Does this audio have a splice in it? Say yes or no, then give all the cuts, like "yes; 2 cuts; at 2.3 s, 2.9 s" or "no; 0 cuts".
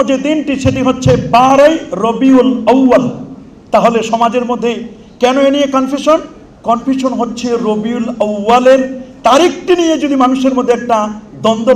no; 0 cuts